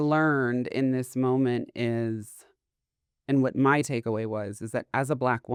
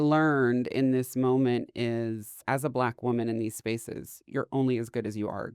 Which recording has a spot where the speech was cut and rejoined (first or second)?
second